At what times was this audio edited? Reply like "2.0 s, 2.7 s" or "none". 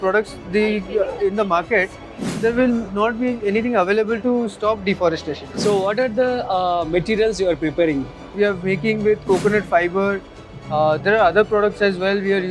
5.4 s, 8.2 s